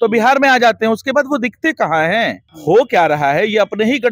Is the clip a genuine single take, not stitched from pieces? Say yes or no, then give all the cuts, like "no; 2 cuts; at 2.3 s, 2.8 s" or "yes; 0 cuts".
no; 1 cut; at 2.5 s